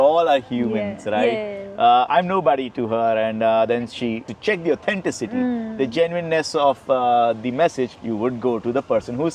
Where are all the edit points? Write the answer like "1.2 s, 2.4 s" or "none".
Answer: none